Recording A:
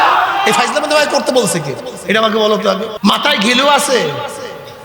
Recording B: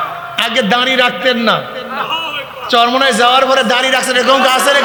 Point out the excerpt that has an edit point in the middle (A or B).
A